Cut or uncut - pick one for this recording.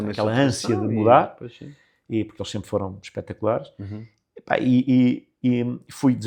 uncut